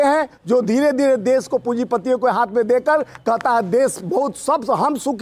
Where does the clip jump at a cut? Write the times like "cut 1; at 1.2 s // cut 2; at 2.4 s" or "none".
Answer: none